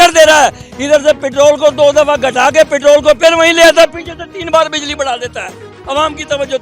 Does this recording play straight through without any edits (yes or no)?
yes